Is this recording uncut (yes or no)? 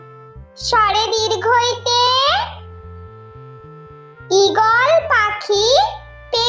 no